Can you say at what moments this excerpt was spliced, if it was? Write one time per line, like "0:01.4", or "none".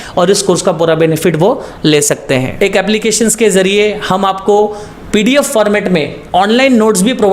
0:02.5